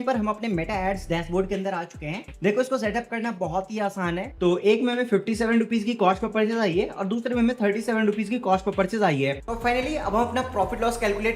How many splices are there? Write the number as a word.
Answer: three